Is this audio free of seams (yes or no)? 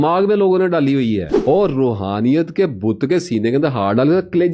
no